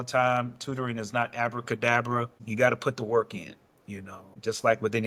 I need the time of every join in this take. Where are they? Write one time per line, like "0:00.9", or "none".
none